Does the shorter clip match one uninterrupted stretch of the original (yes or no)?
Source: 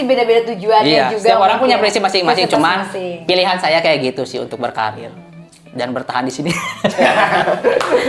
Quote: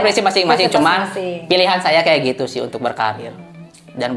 yes